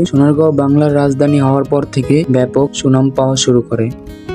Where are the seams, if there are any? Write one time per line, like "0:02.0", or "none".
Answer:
none